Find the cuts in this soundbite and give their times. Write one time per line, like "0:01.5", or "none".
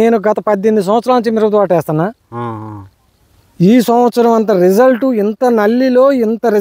none